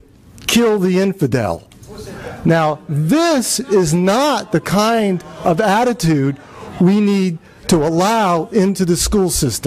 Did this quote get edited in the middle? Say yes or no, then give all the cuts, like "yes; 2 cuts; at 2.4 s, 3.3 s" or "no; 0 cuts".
no; 0 cuts